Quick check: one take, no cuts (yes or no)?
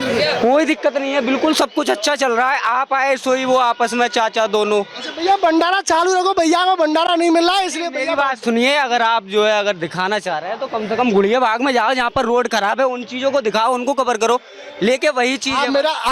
yes